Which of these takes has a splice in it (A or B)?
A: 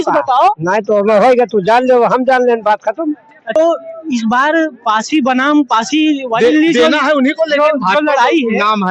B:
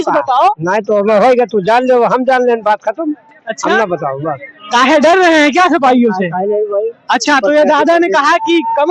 A